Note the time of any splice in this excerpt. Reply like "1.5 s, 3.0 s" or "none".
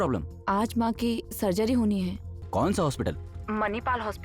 2.3 s